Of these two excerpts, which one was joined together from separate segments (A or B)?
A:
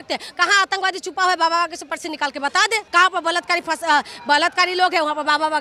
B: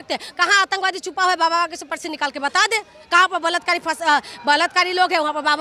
A